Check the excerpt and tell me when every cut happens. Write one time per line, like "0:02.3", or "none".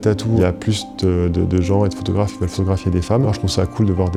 none